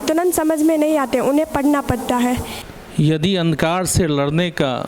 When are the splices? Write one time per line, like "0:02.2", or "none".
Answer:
0:02.5